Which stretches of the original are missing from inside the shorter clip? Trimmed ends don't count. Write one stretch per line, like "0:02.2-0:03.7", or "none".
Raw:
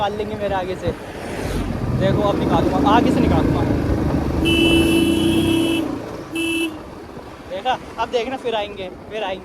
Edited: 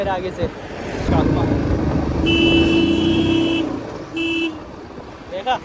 0:01.5-0:03.3